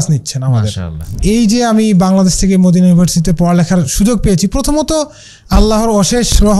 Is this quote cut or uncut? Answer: cut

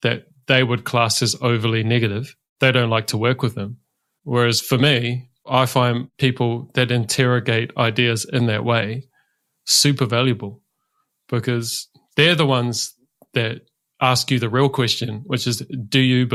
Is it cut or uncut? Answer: uncut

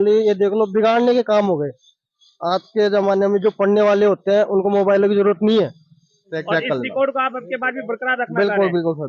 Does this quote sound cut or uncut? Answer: cut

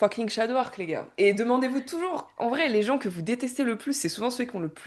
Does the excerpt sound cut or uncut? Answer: uncut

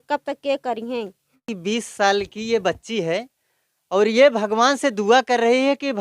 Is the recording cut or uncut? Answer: cut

